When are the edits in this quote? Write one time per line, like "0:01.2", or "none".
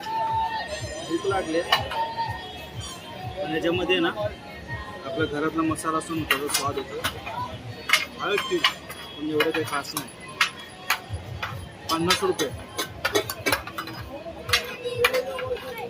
none